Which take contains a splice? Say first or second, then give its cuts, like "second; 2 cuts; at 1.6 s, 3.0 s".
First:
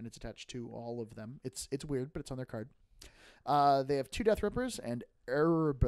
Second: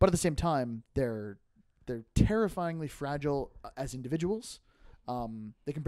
second; 1 cut; at 3.4 s